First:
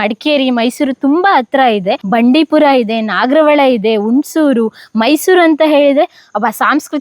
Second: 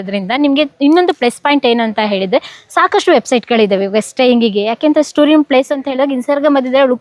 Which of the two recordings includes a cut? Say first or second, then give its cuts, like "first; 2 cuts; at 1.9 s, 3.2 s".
first; 1 cut; at 2.0 s